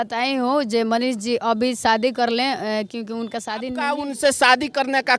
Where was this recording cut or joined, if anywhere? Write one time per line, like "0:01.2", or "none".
0:03.9